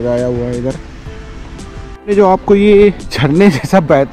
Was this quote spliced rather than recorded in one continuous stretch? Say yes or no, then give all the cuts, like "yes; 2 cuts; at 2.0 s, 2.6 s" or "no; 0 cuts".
yes; 2 cuts; at 1.9 s, 3.1 s